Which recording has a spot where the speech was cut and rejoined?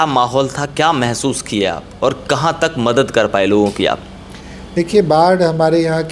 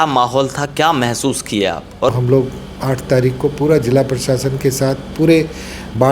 second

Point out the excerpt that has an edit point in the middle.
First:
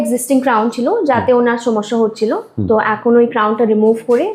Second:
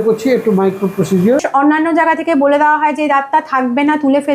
second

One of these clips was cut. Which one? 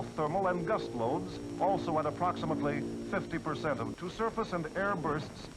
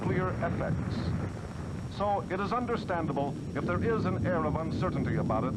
first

